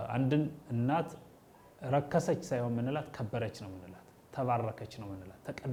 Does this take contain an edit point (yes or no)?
no